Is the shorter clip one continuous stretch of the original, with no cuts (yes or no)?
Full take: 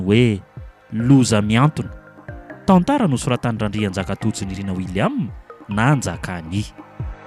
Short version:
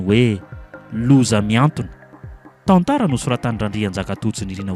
yes